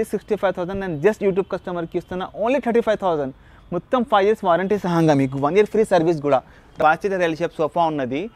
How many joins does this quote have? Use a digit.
1